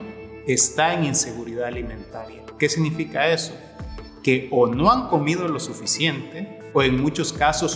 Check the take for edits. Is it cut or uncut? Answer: uncut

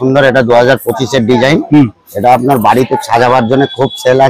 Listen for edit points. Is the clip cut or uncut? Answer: uncut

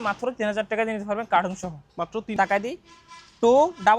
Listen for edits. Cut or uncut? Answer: cut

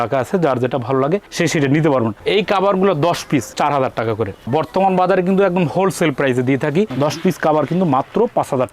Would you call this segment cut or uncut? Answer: cut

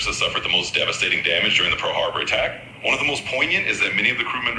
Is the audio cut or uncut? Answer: cut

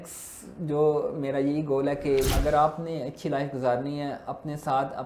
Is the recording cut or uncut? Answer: cut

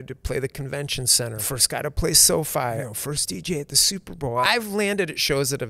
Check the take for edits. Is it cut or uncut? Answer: cut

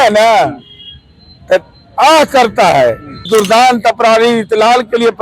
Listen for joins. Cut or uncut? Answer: cut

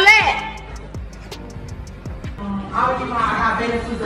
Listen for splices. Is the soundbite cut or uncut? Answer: cut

